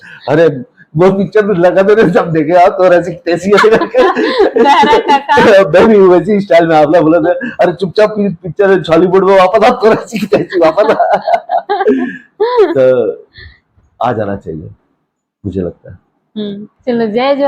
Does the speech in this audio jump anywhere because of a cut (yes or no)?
no